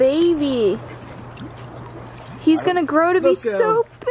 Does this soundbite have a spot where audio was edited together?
no; 0 cuts

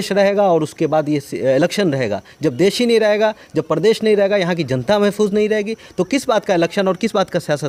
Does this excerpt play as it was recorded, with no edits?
yes; 0 cuts

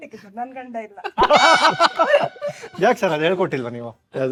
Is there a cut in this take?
no; 0 cuts

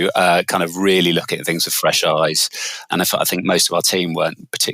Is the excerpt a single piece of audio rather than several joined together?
no; 1 cut; at 2.8 s

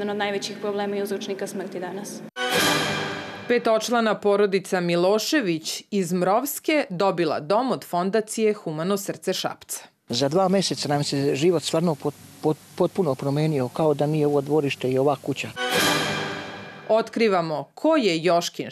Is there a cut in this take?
yes; 2 cuts; at 2.3 s, 3.3 s

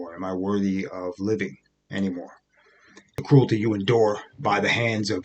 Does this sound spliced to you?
yes; 1 cut; at 3.2 s

